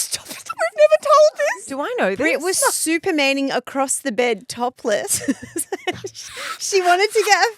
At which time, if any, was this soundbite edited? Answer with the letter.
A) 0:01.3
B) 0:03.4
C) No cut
A